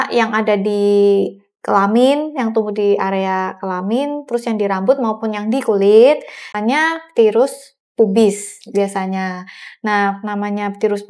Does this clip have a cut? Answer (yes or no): yes